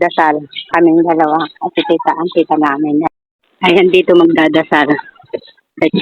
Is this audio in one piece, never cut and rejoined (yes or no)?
no